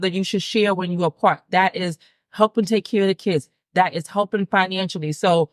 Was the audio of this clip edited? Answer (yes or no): no